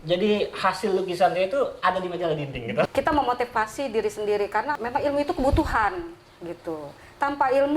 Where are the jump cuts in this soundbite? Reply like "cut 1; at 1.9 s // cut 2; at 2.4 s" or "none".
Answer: cut 1; at 2.9 s // cut 2; at 4.7 s